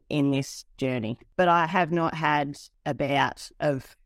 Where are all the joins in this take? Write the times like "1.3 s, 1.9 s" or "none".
1.2 s, 2.7 s